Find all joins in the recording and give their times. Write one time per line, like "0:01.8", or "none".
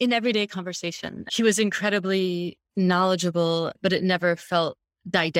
0:01.3
0:02.6